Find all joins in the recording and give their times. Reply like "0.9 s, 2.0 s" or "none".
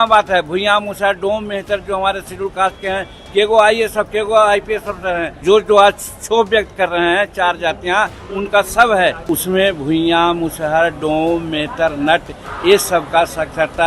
5.4 s, 9.2 s